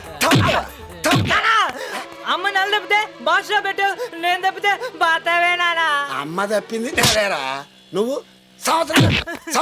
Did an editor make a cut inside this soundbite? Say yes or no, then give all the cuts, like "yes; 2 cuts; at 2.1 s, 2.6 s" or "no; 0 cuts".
no; 0 cuts